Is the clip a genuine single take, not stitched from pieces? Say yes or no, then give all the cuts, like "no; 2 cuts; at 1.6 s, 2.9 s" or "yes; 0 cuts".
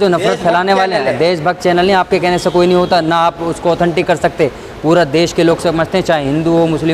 yes; 0 cuts